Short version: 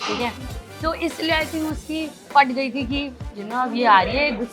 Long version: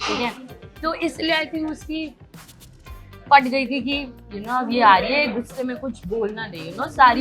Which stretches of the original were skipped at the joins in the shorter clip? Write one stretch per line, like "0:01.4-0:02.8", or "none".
0:02.2-0:03.1